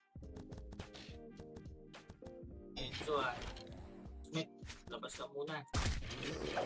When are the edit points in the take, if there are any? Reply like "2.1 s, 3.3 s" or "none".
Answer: 2.8 s